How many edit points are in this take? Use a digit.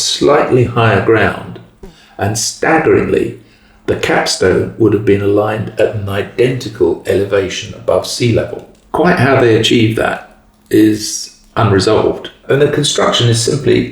1